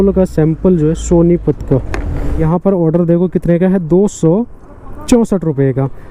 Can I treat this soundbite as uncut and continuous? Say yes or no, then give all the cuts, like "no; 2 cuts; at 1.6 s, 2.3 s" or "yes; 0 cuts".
no; 1 cut; at 2.4 s